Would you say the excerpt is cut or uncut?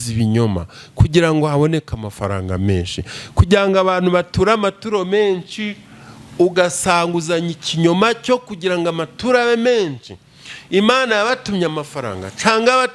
uncut